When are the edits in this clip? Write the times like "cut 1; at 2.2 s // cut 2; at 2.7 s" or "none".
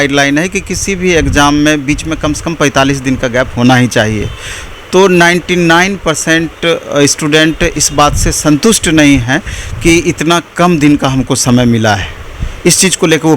none